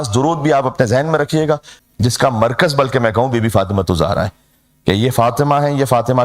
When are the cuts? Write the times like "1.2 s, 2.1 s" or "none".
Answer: 1.7 s